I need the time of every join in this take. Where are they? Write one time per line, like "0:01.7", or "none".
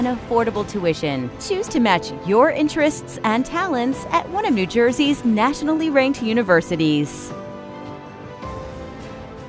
0:07.1